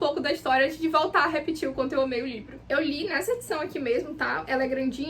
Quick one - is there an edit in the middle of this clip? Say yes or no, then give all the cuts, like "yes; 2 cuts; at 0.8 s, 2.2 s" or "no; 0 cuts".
yes; 1 cut; at 2.6 s